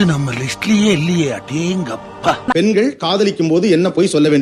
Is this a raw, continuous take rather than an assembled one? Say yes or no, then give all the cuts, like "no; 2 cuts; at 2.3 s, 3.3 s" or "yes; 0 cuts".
no; 1 cut; at 2.5 s